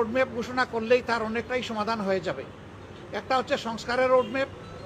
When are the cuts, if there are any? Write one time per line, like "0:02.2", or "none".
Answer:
none